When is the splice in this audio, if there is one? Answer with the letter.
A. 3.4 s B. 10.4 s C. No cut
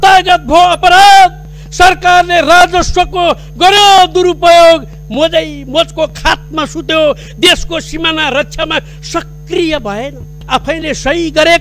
B